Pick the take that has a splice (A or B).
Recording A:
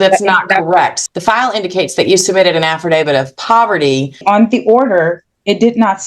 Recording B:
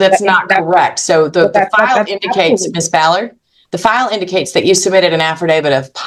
A